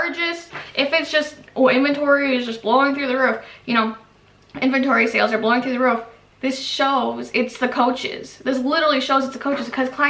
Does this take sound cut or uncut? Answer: uncut